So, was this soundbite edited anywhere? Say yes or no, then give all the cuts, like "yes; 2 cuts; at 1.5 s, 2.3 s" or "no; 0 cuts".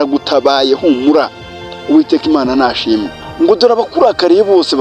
yes; 1 cut; at 3.2 s